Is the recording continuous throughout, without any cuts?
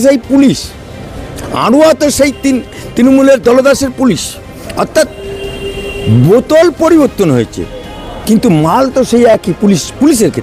yes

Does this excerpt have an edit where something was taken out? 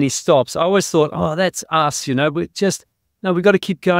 no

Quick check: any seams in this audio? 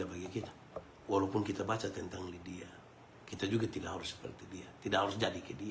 yes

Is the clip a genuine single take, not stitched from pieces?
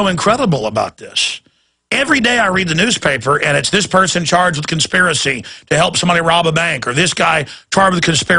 yes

